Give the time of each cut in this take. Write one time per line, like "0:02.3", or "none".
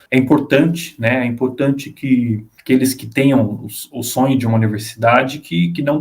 0:02.5

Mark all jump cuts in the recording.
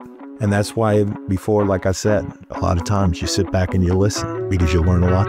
0:04.3

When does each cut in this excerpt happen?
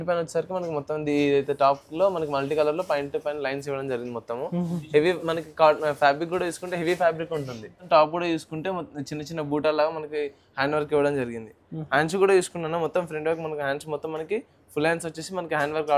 0:07.8

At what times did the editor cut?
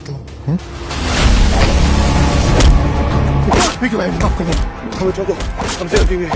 0:03.4

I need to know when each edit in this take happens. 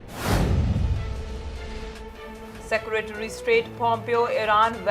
0:02.6

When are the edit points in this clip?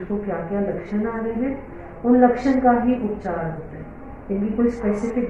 none

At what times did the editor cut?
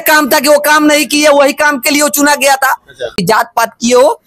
0:03.2

